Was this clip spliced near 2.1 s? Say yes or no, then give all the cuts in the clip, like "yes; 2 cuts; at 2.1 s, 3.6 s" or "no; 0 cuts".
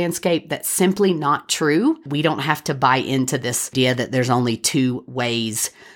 yes; 2 cuts; at 2.1 s, 3.7 s